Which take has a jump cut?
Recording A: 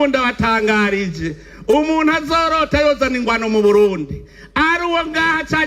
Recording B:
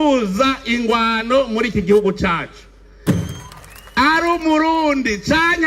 B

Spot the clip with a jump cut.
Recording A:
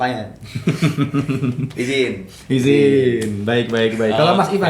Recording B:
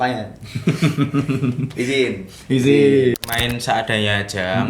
B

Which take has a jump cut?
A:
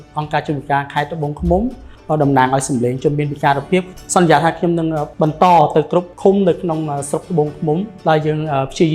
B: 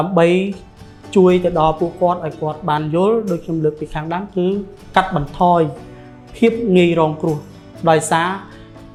A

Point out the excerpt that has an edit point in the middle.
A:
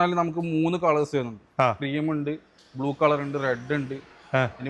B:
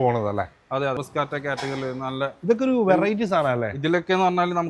B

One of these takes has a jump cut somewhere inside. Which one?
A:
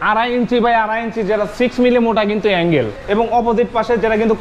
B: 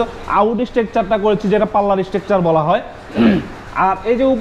A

